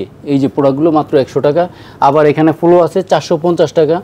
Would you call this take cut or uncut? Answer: uncut